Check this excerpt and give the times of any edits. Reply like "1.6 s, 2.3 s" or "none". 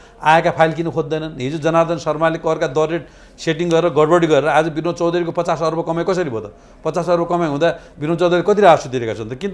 none